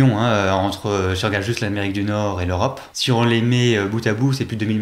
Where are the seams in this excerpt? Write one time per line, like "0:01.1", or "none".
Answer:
0:02.9